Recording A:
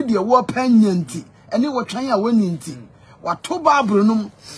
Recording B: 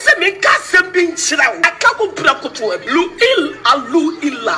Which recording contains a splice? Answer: B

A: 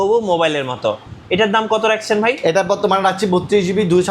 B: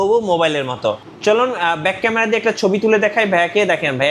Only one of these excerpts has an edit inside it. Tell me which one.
B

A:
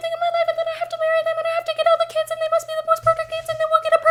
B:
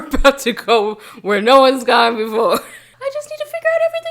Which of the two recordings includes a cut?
B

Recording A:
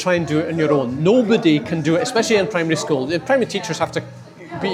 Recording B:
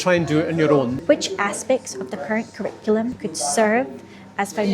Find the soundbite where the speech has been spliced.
B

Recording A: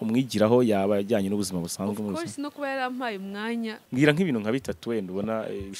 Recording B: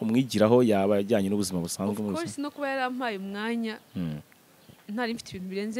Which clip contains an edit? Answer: A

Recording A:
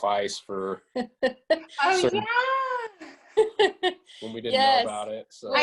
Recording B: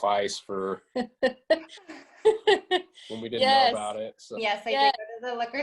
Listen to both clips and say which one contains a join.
B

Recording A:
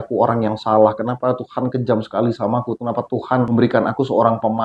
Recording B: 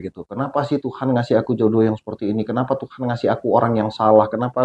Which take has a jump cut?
A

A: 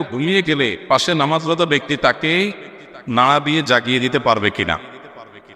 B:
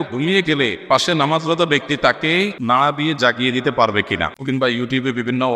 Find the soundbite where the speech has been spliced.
B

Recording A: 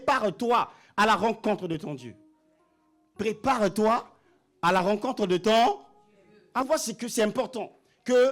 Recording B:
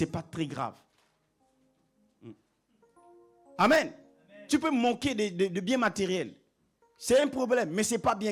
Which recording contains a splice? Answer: A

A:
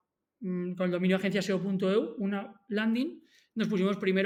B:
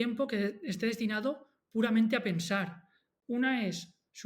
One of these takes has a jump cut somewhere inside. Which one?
B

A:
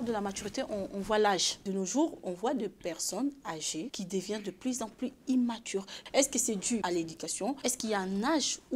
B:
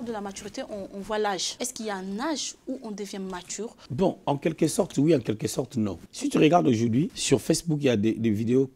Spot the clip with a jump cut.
A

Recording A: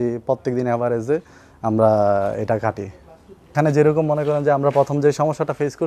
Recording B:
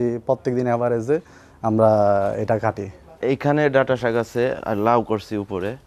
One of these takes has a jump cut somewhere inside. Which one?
B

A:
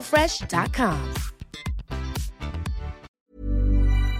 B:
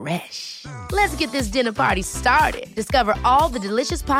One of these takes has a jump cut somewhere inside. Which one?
A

